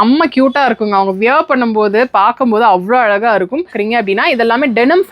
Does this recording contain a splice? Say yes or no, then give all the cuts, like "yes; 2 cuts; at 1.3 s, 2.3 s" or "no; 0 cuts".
yes; 1 cut; at 3.7 s